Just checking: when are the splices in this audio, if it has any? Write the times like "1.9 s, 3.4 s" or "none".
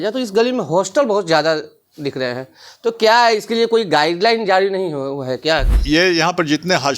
5.7 s